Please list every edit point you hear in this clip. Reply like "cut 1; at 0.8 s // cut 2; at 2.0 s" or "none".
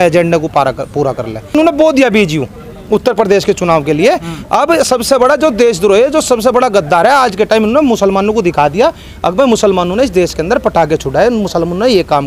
cut 1; at 1.5 s